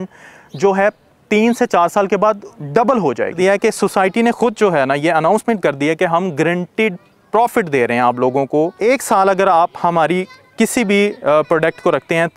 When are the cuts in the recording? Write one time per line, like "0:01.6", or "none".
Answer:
0:03.4
0:08.7